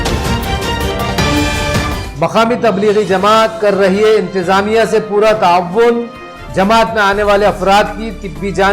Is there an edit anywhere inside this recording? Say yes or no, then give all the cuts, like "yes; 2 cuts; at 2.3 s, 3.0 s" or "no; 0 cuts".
yes; 1 cut; at 2.0 s